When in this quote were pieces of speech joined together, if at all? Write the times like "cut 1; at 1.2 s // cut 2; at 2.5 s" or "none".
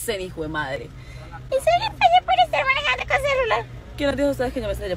none